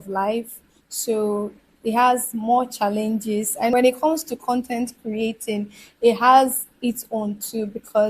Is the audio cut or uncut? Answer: cut